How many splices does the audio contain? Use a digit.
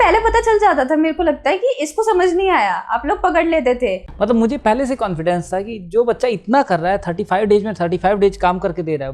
1